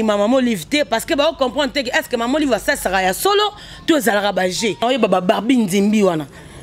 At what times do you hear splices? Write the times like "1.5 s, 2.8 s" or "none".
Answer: 4.8 s